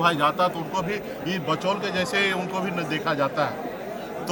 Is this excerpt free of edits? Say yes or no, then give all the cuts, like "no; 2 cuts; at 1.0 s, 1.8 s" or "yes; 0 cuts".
yes; 0 cuts